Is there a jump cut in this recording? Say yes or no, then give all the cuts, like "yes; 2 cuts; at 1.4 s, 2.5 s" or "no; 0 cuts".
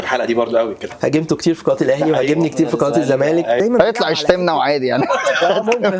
yes; 2 cuts; at 0.9 s, 3.6 s